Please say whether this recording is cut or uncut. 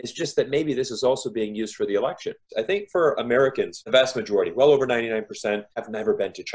cut